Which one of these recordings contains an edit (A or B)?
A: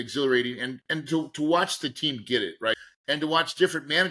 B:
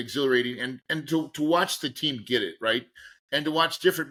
A